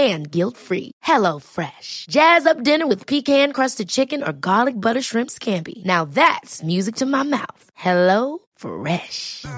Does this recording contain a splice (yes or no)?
no